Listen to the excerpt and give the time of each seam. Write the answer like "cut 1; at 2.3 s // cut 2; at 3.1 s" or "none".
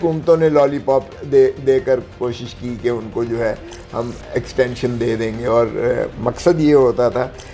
none